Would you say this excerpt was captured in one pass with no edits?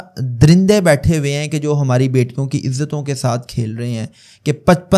yes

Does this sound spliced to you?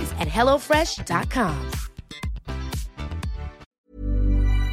yes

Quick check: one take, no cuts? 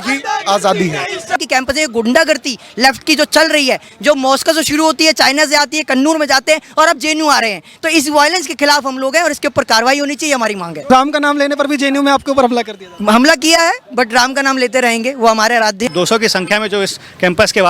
no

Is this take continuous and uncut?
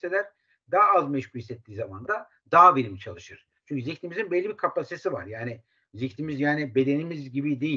yes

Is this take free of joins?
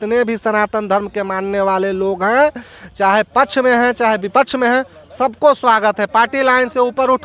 yes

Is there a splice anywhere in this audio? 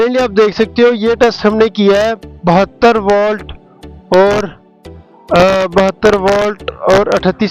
no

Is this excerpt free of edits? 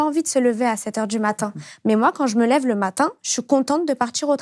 yes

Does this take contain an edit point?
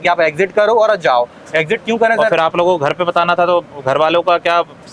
no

